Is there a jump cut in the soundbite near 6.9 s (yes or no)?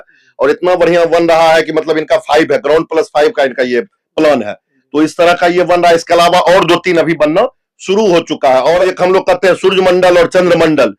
no